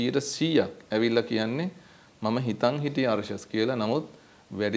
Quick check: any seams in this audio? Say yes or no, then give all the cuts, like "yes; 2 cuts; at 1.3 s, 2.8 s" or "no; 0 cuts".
no; 0 cuts